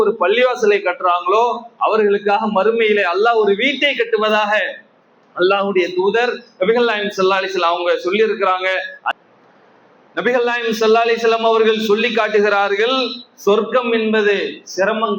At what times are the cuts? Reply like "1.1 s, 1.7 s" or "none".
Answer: 9.1 s